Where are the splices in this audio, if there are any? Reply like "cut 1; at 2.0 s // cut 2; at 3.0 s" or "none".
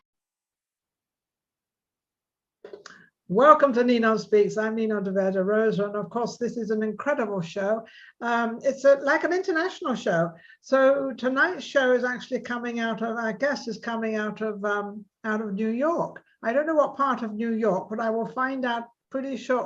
cut 1; at 7.6 s